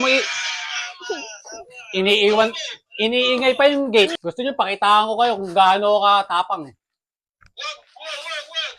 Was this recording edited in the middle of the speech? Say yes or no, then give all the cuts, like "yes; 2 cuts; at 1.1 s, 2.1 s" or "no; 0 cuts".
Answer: yes; 1 cut; at 4.1 s